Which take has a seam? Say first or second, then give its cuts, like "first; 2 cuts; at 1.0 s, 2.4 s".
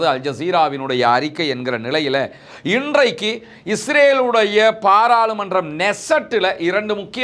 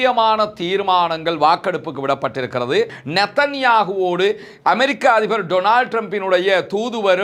second; 1 cut; at 3.0 s